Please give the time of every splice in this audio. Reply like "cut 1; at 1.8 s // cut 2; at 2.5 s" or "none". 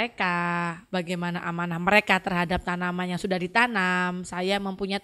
none